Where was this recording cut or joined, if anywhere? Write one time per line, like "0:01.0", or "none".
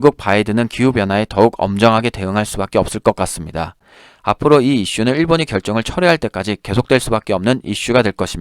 0:03.8

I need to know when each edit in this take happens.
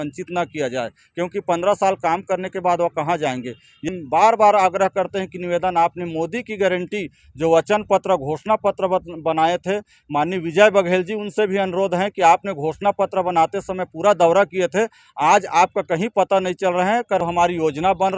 0:03.9
0:17.3

